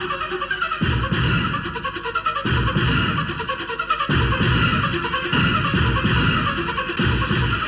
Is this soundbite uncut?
yes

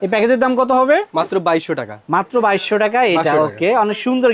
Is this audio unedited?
yes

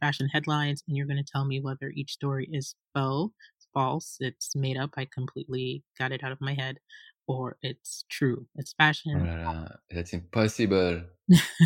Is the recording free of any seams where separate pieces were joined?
yes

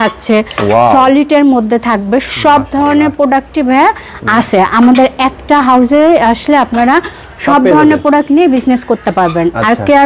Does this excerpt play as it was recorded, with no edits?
yes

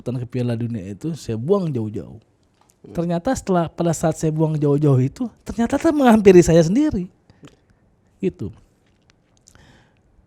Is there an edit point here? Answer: no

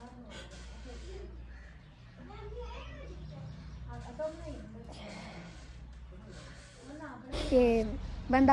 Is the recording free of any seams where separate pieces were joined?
no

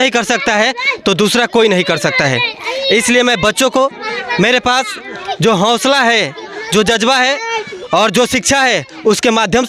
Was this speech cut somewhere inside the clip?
no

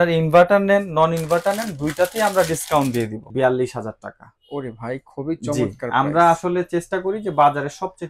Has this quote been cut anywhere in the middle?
yes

